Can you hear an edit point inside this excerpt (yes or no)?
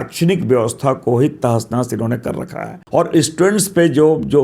yes